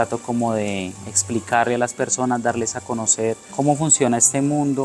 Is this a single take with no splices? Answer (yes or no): no